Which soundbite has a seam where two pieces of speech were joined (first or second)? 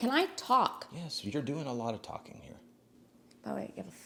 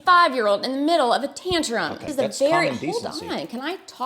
second